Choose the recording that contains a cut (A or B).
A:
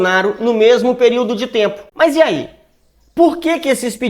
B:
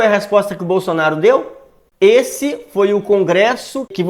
A